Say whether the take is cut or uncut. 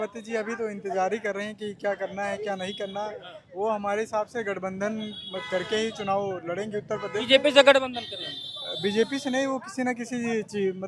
uncut